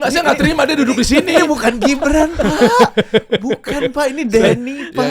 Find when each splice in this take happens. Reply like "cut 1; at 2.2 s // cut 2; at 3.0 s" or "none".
none